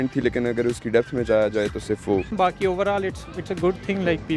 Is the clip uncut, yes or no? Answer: yes